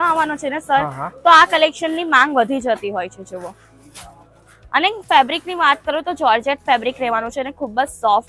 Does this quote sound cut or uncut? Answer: uncut